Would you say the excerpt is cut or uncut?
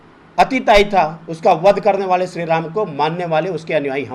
uncut